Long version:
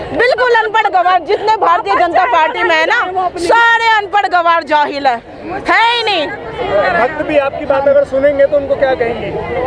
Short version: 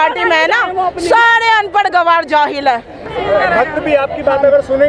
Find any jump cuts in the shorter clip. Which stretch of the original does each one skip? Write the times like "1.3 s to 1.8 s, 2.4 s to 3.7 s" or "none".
5.4 s to 6.4 s